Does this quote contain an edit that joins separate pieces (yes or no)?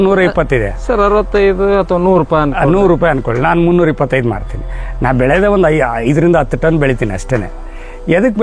no